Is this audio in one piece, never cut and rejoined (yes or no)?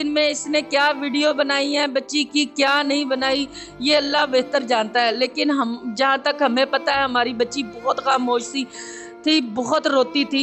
yes